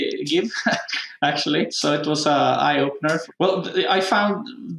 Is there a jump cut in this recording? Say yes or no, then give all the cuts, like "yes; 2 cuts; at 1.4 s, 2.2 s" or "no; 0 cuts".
no; 0 cuts